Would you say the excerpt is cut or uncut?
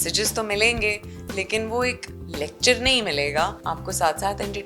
cut